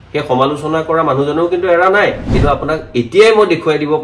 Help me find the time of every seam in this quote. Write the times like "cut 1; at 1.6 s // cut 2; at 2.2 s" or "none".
cut 1; at 2.2 s